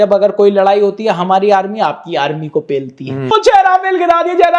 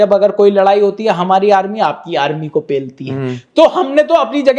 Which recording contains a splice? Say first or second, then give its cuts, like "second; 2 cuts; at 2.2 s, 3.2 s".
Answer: first; 1 cut; at 3.2 s